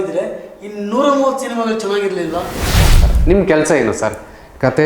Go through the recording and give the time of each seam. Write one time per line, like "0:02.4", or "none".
0:02.9